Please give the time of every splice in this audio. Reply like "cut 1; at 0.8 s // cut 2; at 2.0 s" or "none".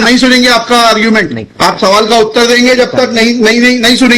cut 1; at 1.1 s